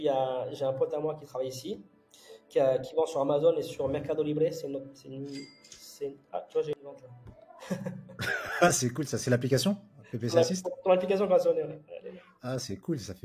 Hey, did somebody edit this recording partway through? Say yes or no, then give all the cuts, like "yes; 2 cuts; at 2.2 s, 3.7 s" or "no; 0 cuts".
no; 0 cuts